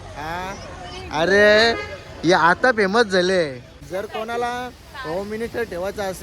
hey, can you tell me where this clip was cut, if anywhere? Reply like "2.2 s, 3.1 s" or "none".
3.7 s